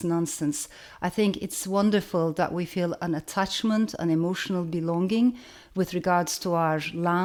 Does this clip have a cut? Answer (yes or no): no